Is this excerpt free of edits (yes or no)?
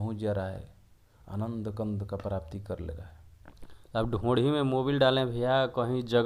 yes